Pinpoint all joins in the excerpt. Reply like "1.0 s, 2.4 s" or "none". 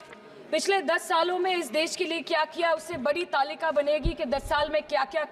none